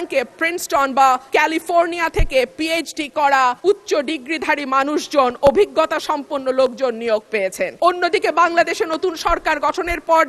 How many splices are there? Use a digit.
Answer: 3